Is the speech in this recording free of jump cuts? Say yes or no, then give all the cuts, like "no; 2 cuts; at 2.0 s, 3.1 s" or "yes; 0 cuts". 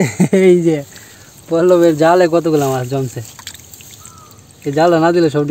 yes; 0 cuts